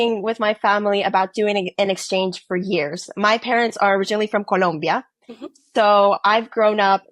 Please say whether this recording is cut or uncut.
uncut